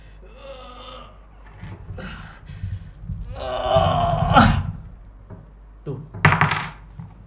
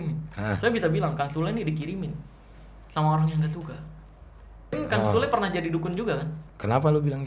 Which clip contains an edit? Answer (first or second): second